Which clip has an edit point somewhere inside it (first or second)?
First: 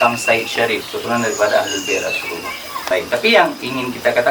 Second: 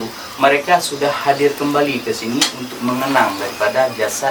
first